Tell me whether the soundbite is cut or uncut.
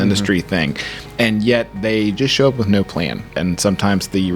cut